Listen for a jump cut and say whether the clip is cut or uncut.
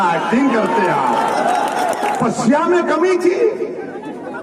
cut